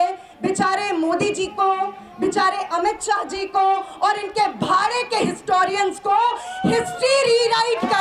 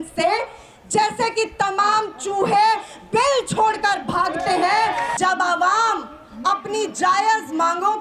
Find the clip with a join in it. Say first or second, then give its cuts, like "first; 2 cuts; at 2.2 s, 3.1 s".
second; 1 cut; at 5.1 s